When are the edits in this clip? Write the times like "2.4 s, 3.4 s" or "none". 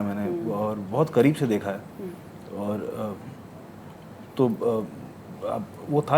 none

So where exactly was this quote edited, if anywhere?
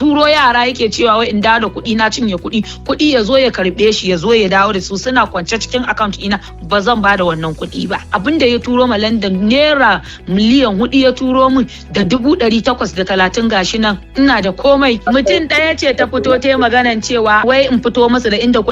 8.0 s, 15.1 s, 17.4 s

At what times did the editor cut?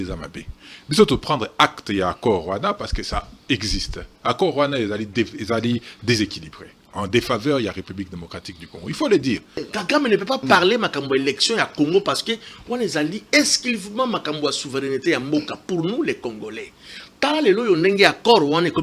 9.7 s

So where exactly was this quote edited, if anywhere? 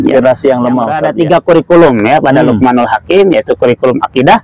1.1 s

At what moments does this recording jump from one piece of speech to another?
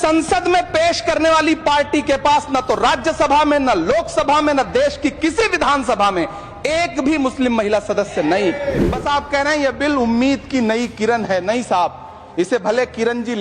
8.9 s

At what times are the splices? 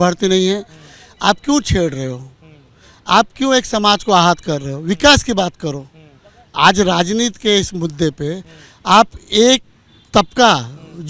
none

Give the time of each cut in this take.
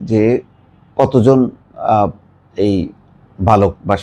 none

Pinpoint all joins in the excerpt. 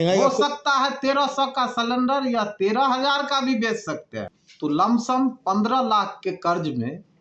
4.1 s

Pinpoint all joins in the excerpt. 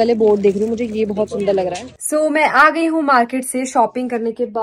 1.9 s

